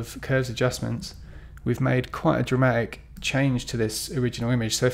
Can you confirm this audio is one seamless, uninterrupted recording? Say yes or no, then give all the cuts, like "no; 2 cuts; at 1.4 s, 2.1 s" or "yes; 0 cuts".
yes; 0 cuts